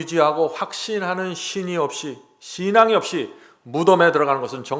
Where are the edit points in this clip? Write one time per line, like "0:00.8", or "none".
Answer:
none